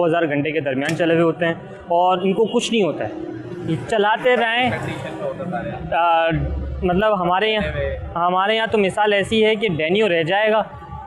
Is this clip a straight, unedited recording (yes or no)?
yes